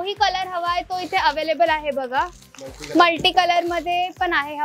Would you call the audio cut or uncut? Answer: uncut